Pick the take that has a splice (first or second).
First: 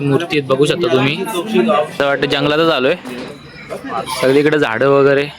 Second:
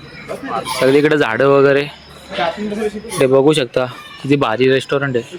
first